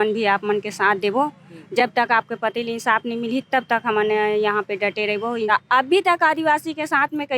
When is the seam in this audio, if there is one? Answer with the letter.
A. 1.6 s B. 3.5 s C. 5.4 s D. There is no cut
C